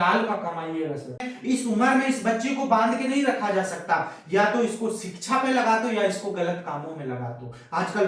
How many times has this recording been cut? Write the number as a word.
one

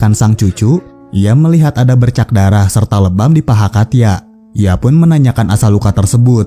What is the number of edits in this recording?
zero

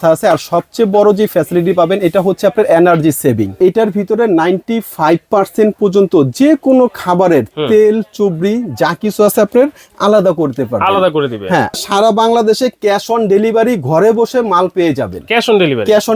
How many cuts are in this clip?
two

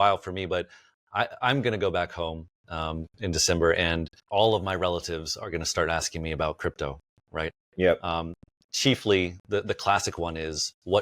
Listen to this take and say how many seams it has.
one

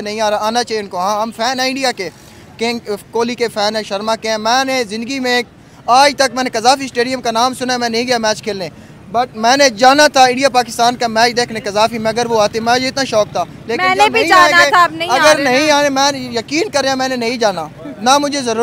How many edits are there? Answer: zero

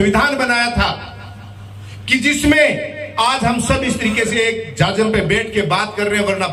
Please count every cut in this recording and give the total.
zero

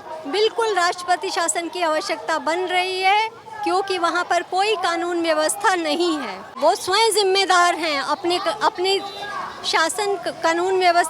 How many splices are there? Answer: one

